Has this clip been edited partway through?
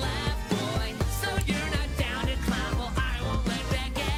no; 0 cuts

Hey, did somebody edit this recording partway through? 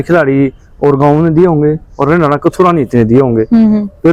no; 0 cuts

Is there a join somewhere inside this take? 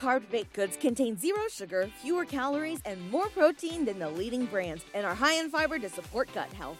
no; 0 cuts

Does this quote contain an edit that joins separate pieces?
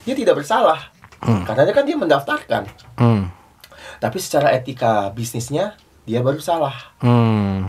no; 0 cuts

